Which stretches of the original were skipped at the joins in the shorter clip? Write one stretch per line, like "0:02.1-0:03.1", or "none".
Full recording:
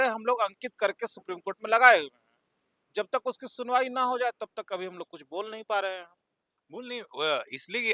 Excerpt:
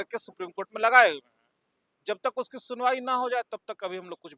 none